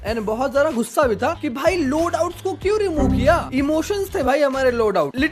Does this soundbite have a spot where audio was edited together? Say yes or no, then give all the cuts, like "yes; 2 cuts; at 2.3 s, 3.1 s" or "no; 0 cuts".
no; 0 cuts